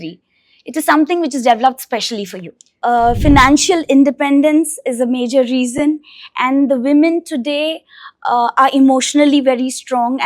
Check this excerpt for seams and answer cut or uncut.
cut